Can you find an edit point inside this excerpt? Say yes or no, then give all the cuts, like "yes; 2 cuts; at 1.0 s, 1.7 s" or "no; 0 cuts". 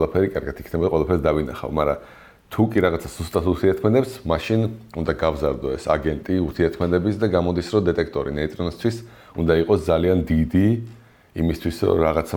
no; 0 cuts